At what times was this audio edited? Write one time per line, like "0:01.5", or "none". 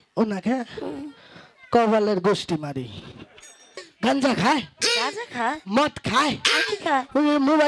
0:03.8

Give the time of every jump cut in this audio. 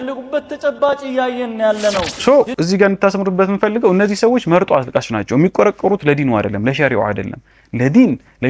0:02.1

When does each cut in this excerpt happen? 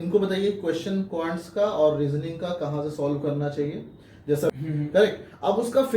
0:04.5

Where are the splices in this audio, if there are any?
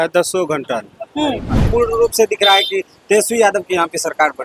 0:01.6

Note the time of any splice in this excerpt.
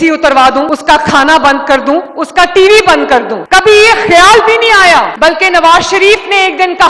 none

